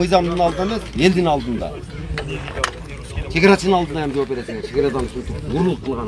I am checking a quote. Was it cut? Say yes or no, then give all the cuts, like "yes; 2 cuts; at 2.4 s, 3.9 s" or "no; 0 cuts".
no; 0 cuts